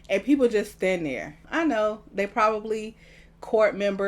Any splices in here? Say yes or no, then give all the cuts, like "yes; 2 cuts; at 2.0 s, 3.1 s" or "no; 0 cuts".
yes; 1 cut; at 1.4 s